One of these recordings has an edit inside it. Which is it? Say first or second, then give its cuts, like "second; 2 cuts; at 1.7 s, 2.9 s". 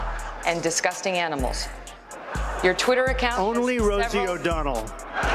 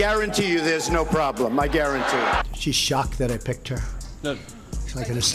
second; 1 cut; at 2.5 s